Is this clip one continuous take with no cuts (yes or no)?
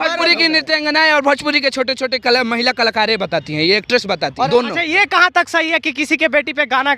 no